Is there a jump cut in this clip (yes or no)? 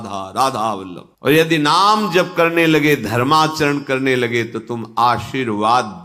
yes